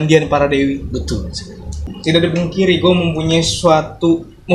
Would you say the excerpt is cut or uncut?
cut